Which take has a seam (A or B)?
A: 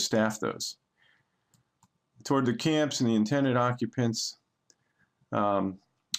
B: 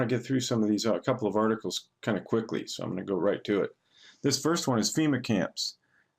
B